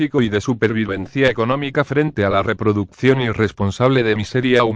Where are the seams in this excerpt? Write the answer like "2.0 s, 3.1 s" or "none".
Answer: 3.1 s